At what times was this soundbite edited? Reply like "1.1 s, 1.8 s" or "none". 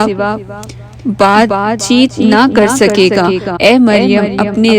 3.5 s